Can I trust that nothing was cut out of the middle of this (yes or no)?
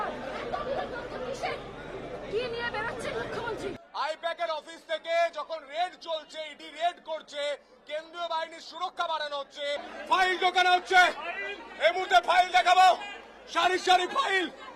no